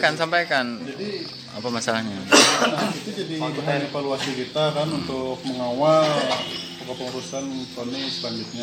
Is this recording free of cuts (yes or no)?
yes